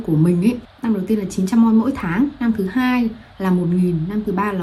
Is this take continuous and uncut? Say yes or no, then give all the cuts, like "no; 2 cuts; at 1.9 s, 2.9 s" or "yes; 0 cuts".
yes; 0 cuts